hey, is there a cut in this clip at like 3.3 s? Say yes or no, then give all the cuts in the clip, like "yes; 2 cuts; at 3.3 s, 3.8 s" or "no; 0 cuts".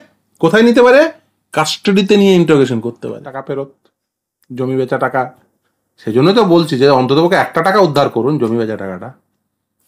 yes; 1 cut; at 3.3 s